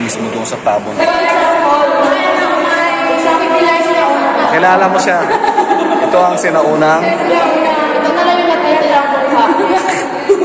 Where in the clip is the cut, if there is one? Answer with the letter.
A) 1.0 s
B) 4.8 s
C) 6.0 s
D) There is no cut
A